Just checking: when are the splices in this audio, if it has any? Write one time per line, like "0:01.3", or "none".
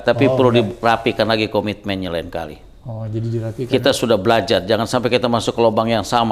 none